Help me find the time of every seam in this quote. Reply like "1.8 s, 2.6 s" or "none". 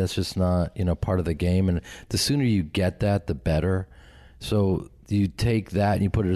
none